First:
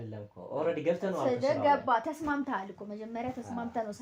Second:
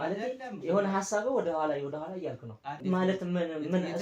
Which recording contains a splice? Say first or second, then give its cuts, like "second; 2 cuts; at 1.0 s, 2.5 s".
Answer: second; 1 cut; at 2.7 s